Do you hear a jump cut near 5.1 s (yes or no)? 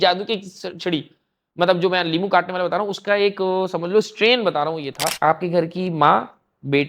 yes